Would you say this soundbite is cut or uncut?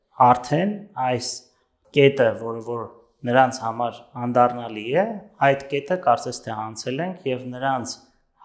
uncut